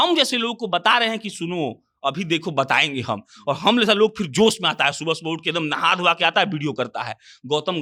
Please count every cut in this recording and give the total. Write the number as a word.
zero